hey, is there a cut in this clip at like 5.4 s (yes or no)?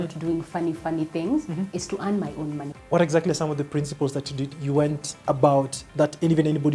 no